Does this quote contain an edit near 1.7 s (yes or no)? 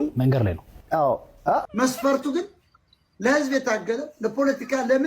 yes